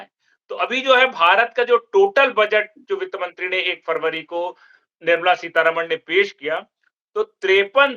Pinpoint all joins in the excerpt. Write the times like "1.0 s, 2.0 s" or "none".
none